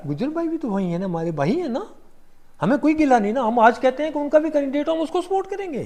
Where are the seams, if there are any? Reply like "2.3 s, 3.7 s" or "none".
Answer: none